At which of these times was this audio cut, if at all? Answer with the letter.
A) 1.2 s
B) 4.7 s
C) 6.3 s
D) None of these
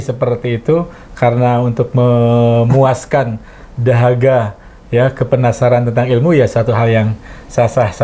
D